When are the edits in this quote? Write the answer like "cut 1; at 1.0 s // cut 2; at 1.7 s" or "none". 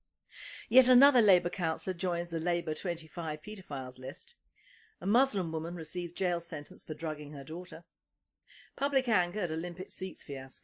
none